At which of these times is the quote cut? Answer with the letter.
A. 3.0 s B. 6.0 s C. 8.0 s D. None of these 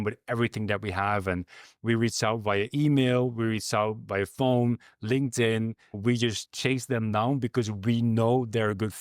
B